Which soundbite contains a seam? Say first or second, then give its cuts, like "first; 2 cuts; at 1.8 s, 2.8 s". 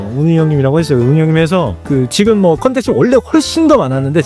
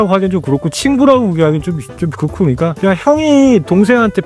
second; 1 cut; at 2.8 s